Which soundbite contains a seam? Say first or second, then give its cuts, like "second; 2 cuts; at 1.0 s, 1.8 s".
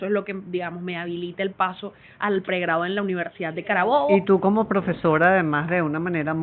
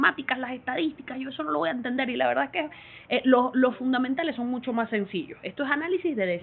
first; 1 cut; at 4.1 s